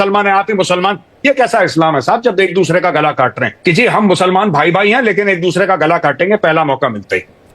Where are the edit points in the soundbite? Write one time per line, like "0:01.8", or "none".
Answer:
0:03.5